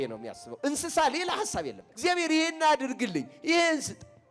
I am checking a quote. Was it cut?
yes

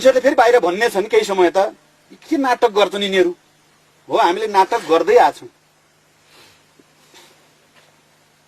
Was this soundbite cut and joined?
no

